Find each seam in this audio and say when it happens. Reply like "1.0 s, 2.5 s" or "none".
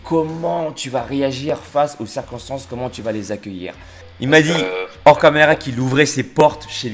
4.1 s